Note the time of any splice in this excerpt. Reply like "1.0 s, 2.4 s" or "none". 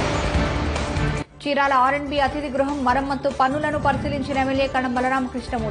none